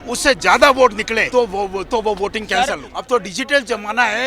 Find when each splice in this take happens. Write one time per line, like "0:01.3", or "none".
0:01.2
0:02.9